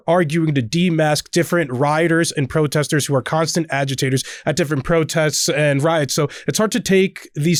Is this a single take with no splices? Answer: yes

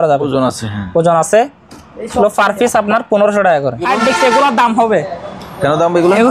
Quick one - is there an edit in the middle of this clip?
yes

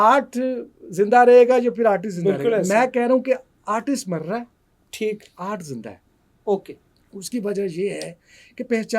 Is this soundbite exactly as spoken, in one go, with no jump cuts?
yes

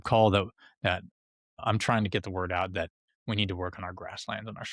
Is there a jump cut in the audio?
no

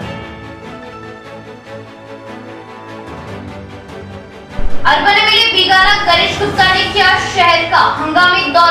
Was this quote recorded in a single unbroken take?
yes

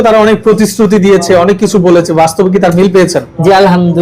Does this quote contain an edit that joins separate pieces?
no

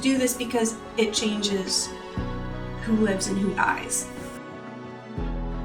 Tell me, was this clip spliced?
yes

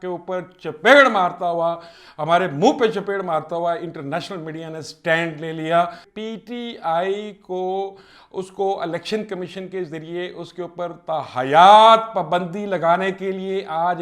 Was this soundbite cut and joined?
yes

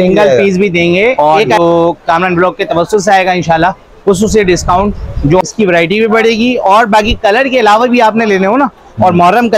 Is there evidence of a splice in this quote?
yes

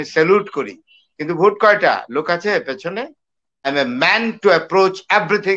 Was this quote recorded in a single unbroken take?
no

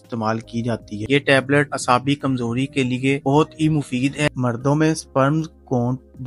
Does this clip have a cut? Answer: yes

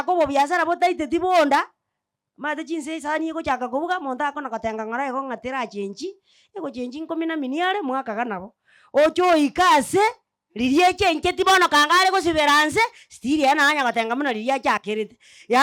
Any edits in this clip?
no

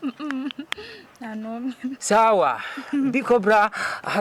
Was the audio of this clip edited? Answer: no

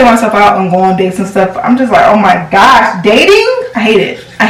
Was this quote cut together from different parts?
no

